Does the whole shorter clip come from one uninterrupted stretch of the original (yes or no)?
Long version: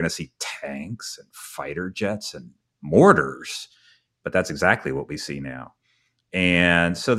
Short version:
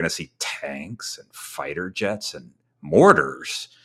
yes